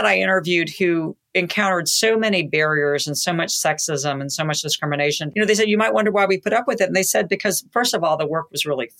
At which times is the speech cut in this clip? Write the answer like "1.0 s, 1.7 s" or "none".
5.2 s